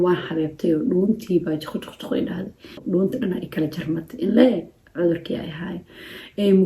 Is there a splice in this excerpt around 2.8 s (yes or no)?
yes